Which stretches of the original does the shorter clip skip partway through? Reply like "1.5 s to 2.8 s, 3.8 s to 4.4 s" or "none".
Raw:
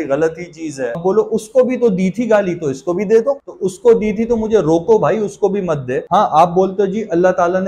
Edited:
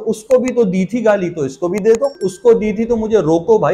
3.5 s to 3.6 s